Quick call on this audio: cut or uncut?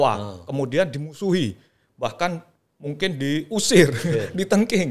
uncut